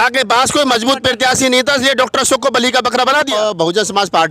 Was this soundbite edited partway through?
yes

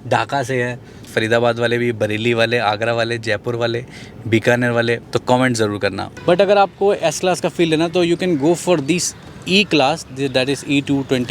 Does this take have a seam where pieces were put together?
yes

